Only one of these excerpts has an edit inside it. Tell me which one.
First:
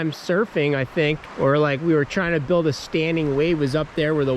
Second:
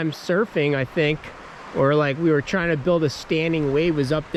first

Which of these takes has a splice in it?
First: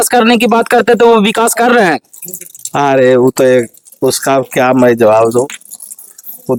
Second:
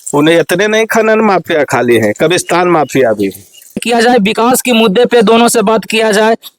second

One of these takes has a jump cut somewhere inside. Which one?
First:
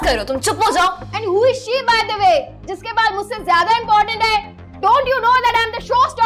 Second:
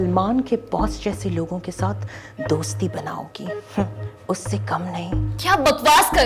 first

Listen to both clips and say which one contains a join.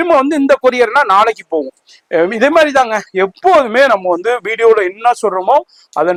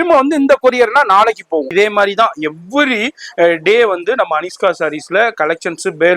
second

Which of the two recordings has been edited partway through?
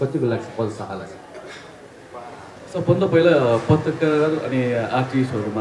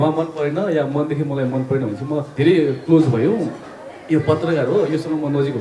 second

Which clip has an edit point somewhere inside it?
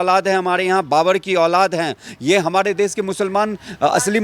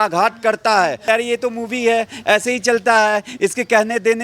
second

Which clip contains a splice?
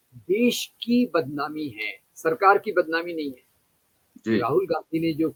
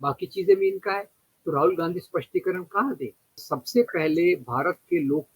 second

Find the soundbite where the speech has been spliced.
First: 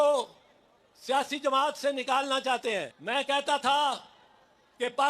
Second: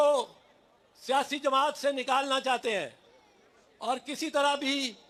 first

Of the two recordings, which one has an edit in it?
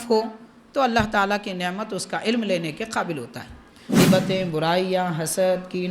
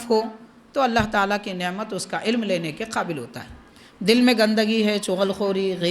first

